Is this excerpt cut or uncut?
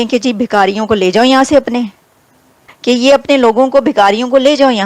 uncut